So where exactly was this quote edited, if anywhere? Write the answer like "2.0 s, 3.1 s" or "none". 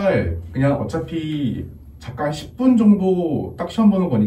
none